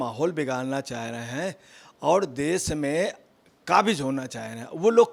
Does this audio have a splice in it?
no; 0 cuts

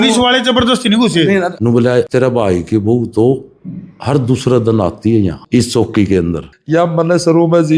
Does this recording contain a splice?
yes; 3 cuts; at 1.6 s, 5.4 s, 6.5 s

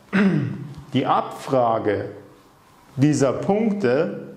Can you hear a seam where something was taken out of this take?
no; 0 cuts

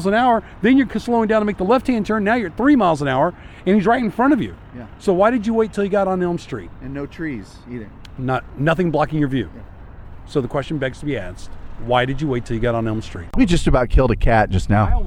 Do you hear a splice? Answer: yes; 1 cut; at 13.3 s

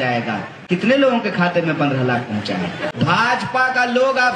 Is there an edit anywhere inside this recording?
yes; 1 cut; at 2.9 s

